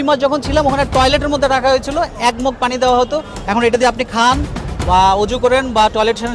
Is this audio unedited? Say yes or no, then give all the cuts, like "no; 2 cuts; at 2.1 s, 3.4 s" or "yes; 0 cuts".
yes; 0 cuts